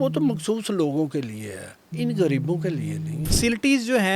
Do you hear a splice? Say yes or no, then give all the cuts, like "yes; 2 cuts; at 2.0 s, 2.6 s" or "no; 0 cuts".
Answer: yes; 2 cuts; at 1.8 s, 3.2 s